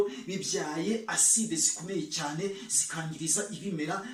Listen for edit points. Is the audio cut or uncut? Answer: uncut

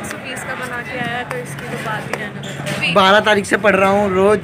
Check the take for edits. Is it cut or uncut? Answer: cut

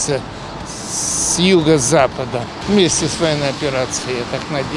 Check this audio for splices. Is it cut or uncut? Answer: cut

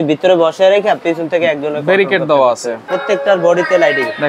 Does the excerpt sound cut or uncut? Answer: cut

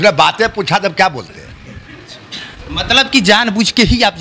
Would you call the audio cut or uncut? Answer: uncut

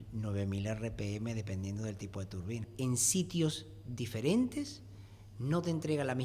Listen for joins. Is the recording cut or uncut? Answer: cut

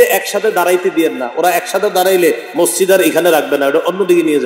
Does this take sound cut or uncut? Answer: uncut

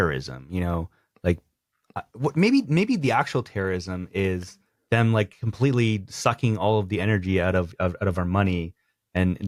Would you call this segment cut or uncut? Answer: uncut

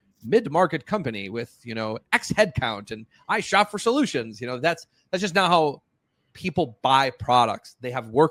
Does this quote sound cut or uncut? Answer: uncut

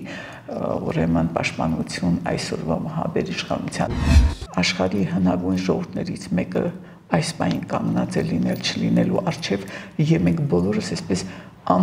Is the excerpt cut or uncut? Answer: cut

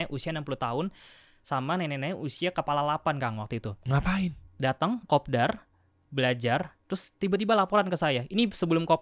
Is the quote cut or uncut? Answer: uncut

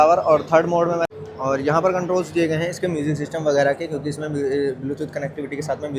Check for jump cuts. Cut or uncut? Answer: cut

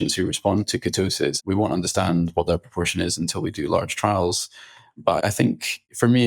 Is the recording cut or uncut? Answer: cut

